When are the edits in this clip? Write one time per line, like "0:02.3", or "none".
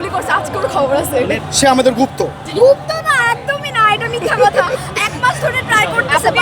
0:01.4
0:02.4